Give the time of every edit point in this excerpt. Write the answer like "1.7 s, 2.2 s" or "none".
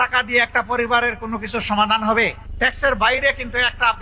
2.4 s